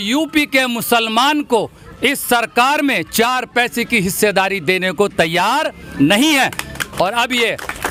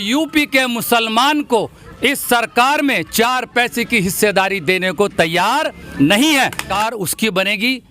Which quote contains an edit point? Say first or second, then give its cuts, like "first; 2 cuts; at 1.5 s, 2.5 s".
second; 1 cut; at 6.7 s